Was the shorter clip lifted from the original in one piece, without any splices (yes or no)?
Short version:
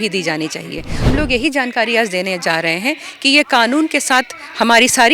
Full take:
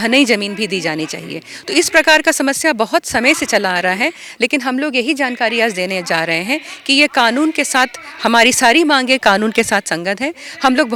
no